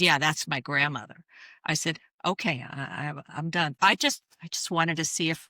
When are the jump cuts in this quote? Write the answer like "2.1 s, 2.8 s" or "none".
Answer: 3.7 s